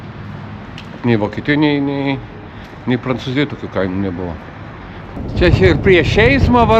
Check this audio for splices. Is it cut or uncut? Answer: cut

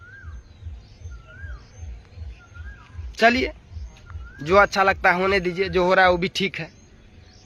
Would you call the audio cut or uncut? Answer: uncut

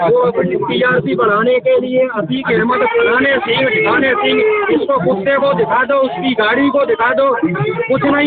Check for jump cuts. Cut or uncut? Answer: uncut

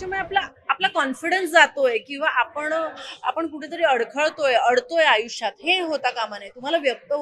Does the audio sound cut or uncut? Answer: uncut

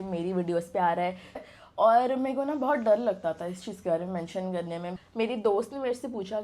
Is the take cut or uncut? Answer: cut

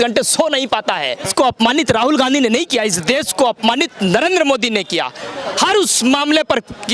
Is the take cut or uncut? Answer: cut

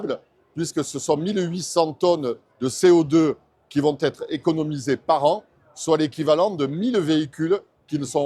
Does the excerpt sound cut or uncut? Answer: uncut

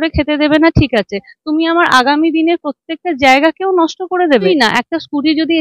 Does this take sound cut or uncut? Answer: cut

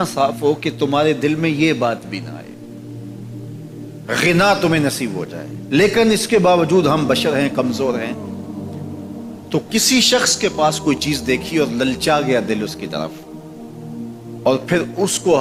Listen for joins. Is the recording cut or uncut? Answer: uncut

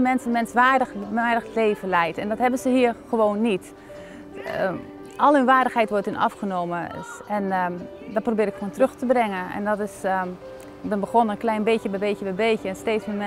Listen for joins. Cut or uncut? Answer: uncut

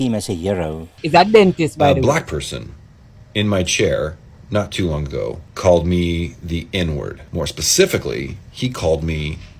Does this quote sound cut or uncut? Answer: cut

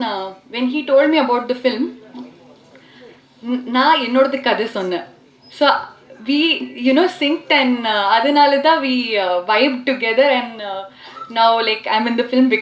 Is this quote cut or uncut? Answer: uncut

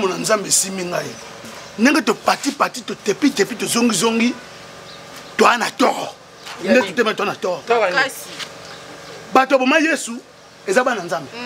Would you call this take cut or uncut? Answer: uncut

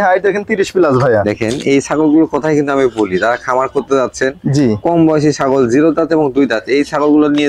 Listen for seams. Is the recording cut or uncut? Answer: uncut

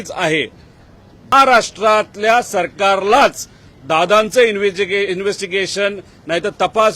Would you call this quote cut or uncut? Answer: cut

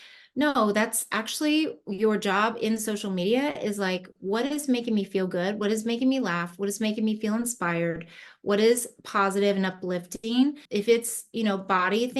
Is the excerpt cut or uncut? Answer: cut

